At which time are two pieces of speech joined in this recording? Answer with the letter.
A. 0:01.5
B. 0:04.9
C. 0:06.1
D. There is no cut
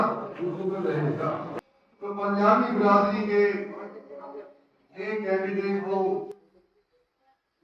A